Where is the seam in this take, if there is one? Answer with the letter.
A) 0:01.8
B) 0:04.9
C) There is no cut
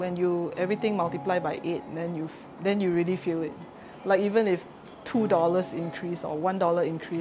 C